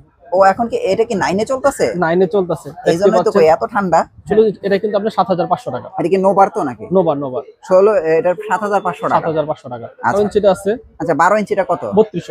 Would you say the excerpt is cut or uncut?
cut